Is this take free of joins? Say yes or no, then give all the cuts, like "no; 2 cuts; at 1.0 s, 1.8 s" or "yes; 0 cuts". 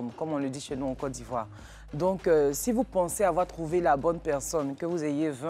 yes; 0 cuts